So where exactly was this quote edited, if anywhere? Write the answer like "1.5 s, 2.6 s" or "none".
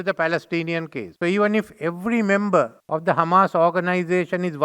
1.0 s, 2.8 s